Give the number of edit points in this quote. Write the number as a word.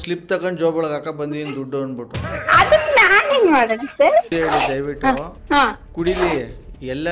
one